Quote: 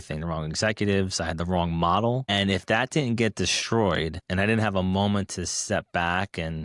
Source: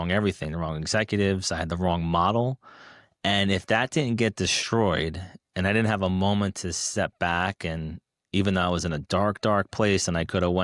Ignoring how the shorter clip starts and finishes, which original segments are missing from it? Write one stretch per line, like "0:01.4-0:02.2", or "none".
0:02.6-0:03.3
0:05.2-0:05.5